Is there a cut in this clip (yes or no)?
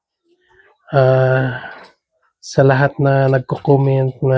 no